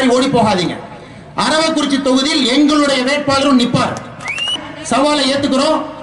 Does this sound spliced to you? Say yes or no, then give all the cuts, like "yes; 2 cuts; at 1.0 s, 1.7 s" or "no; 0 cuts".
yes; 1 cut; at 4.6 s